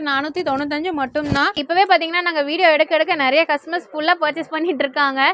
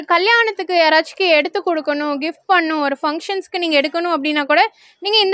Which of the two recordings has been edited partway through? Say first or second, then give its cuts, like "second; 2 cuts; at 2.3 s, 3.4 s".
first; 1 cut; at 1.6 s